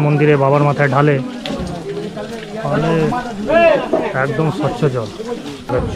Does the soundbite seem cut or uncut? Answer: uncut